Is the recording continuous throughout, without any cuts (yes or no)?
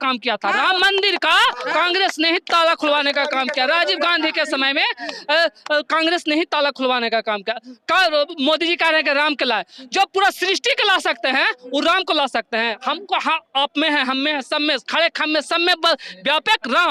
yes